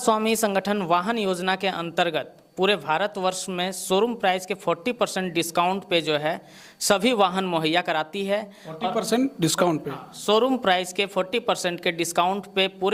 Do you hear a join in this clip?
no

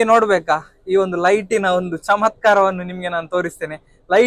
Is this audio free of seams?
yes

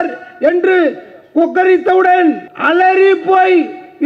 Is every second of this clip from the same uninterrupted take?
no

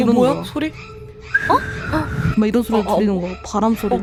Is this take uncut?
yes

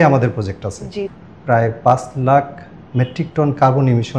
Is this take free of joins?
no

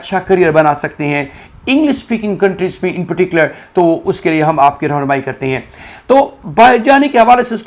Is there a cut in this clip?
no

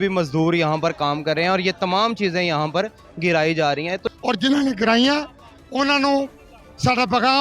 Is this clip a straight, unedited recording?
no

